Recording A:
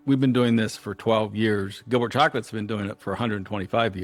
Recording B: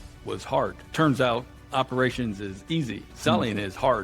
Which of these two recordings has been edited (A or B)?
B